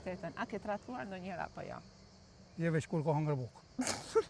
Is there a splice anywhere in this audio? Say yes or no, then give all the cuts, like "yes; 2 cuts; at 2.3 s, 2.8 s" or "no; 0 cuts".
no; 0 cuts